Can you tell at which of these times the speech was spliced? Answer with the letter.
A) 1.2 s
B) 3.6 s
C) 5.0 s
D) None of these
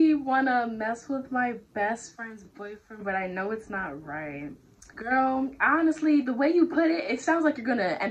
D